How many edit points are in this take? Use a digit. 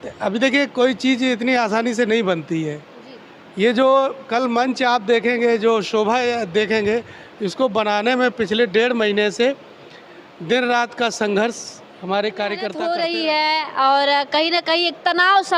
1